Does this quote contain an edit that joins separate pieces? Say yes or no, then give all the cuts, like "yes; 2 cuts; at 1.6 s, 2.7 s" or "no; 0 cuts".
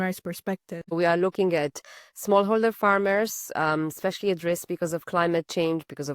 yes; 1 cut; at 0.9 s